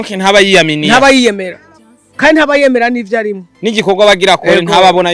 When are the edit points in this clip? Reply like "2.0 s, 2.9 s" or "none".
none